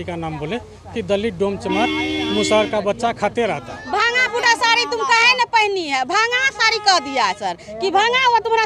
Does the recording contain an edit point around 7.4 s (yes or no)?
no